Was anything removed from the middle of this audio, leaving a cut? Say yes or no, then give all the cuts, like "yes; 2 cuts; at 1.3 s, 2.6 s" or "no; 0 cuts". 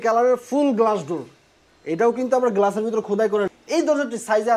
yes; 1 cut; at 3.5 s